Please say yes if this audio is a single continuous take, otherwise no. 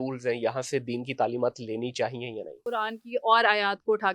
no